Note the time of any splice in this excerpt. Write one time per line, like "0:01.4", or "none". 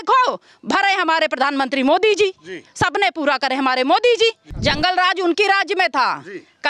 0:04.5